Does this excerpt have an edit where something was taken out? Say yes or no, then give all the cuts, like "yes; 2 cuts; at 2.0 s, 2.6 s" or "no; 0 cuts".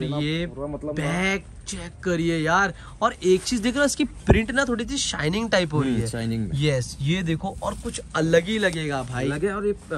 no; 0 cuts